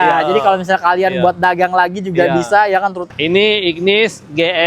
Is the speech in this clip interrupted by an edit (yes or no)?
yes